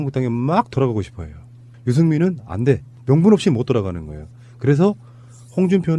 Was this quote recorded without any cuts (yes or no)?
no